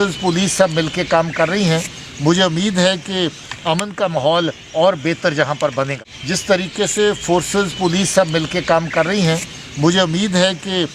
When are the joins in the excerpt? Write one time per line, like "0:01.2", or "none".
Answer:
0:06.0